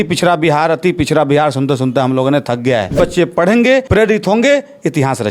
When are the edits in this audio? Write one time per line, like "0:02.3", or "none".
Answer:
0:02.9
0:03.9

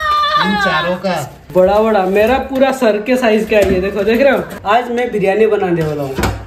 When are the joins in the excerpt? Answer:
0:01.4
0:04.5

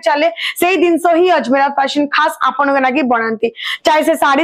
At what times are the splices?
none

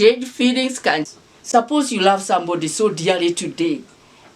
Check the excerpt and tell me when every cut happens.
0:01.1

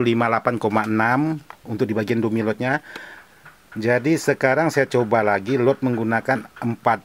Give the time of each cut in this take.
none

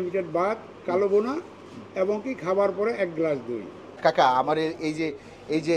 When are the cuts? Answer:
0:03.9

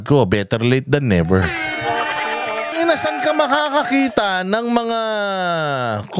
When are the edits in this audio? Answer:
0:02.7

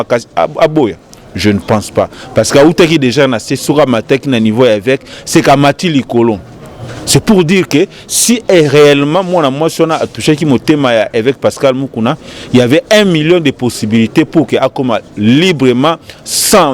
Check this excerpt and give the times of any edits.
none

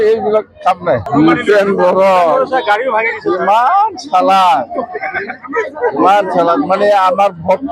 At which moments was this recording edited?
0:01.0

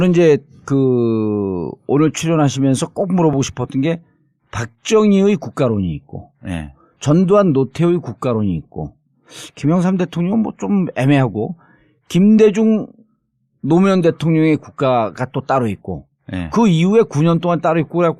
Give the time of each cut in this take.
0:09.9

